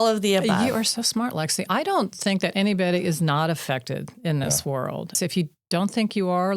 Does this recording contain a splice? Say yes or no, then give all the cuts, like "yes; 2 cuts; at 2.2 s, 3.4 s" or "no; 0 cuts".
yes; 1 cut; at 5.2 s